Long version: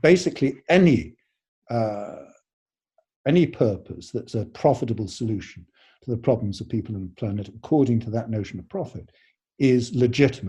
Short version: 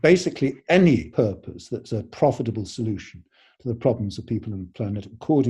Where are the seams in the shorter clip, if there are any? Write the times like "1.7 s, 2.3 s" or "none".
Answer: 1.1 s